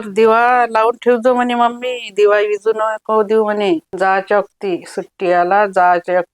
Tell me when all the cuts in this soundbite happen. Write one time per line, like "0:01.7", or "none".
0:03.9